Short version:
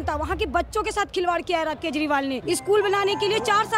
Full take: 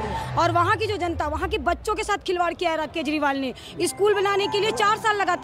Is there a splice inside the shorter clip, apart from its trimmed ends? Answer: yes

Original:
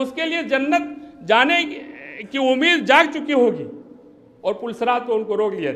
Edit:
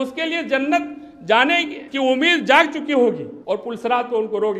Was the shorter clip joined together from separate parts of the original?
yes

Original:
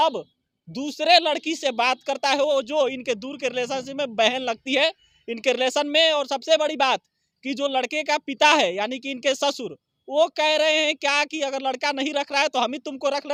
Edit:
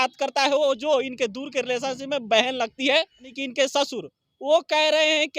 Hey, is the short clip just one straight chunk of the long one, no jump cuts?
no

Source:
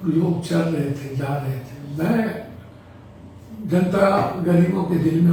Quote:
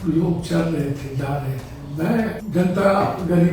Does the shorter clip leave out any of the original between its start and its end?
yes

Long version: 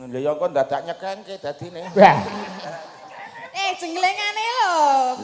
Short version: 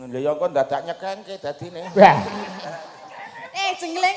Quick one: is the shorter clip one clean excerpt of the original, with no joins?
yes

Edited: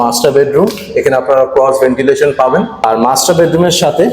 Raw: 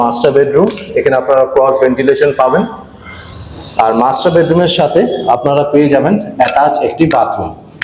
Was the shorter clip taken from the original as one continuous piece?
no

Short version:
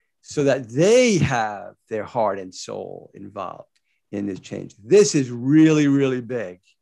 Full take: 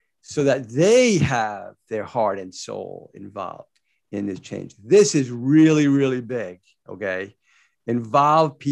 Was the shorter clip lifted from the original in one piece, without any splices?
yes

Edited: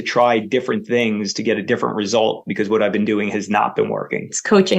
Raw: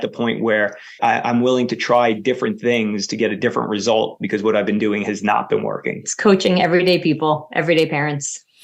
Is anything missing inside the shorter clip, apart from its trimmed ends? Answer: no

